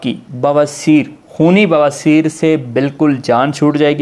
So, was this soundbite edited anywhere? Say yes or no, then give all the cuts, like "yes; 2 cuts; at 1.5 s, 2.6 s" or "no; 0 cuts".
no; 0 cuts